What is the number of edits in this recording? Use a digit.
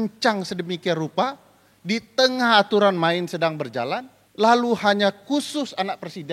1